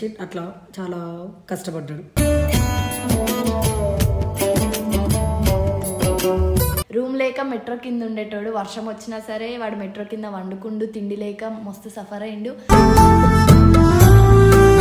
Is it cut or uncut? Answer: cut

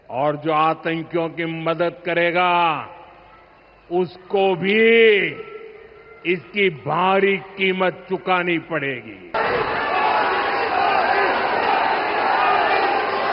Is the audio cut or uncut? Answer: cut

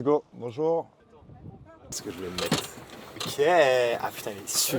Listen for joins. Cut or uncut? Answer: uncut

